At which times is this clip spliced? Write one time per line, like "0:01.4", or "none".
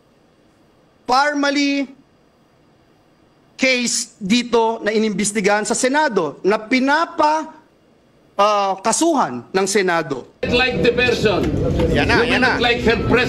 0:10.4